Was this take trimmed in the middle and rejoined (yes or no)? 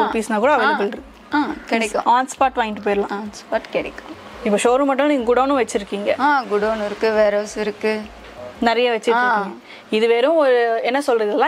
no